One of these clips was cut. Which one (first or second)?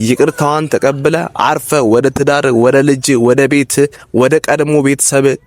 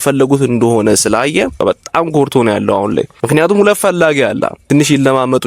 second